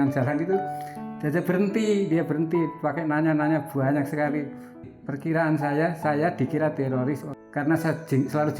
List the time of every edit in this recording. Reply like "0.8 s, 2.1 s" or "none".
4.9 s, 7.3 s